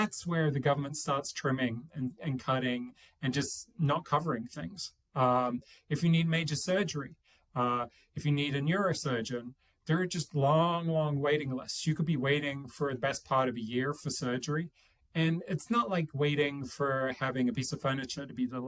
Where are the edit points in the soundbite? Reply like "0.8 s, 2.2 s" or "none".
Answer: none